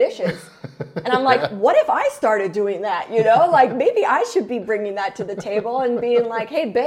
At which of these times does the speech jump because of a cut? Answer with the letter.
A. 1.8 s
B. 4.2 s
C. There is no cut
C